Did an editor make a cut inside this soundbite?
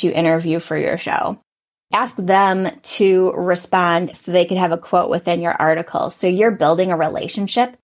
yes; 1 cut; at 4.1 s

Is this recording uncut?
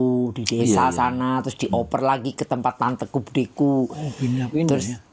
yes; 0 cuts

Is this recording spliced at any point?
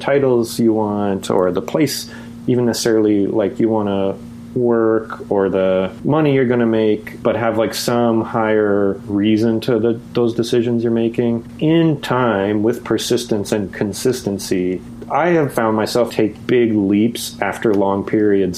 yes; 2 cuts; at 11.4 s, 16.1 s

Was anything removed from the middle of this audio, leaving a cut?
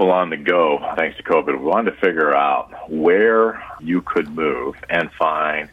yes; 2 cuts; at 0.9 s, 3.7 s

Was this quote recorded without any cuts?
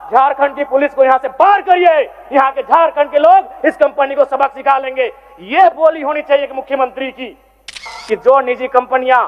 no; 1 cut; at 7.9 s

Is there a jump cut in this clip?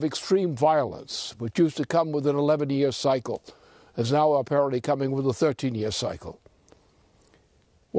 no; 0 cuts

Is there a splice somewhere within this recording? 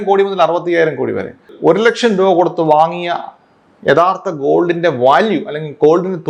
yes; 1 cut; at 1.5 s

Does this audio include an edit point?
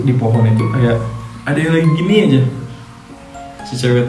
no; 0 cuts

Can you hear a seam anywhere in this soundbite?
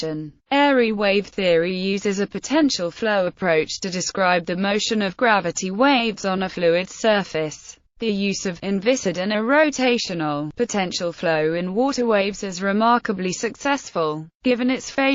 no; 0 cuts

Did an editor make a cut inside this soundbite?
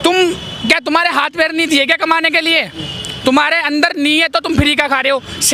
no; 0 cuts

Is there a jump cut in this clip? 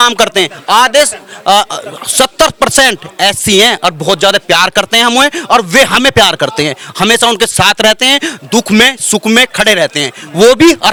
no; 0 cuts

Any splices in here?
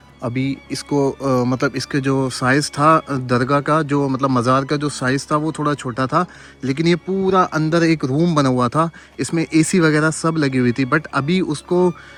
no; 0 cuts

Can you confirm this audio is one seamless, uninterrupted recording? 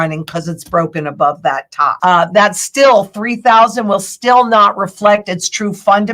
no; 1 cut; at 2.0 s

